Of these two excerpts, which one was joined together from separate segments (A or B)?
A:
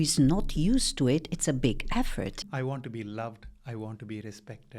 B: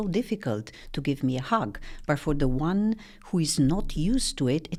A